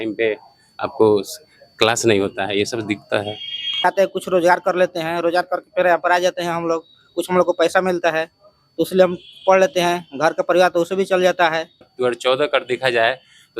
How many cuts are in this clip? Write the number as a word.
two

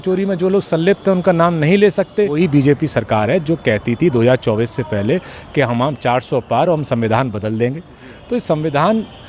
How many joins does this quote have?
one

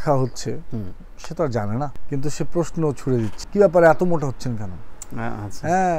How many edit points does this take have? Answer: two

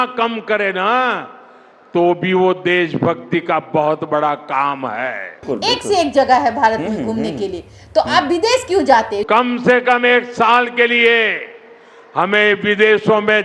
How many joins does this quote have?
two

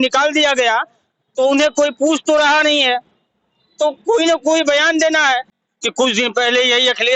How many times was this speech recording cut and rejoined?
one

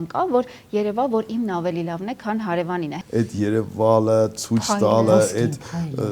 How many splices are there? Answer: one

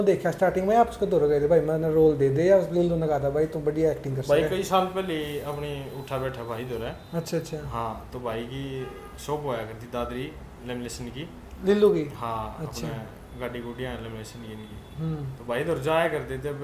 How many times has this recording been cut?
zero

